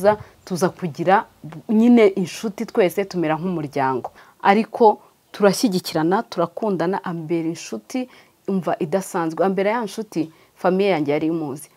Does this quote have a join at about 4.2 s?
yes; 1 cut; at 4.2 s

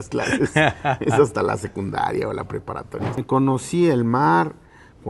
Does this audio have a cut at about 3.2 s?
yes; 1 cut; at 3.2 s

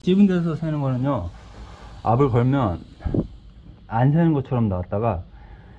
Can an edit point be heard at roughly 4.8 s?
no; 0 cuts

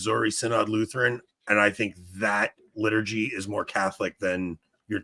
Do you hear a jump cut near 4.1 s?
no; 0 cuts

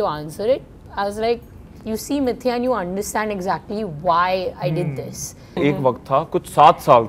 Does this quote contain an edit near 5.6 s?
yes; 1 cut; at 5.6 s

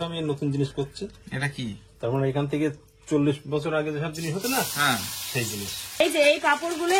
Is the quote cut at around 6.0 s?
yes; 1 cut; at 6.0 s

